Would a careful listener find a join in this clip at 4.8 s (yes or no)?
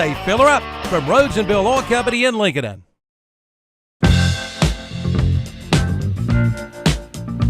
yes